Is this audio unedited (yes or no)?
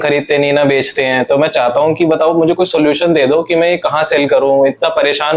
yes